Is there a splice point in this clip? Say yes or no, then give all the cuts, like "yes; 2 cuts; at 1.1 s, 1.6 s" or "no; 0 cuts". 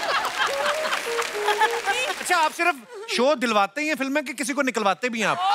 yes; 1 cut; at 2.2 s